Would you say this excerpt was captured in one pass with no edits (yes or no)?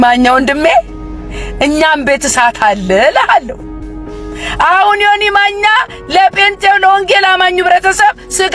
yes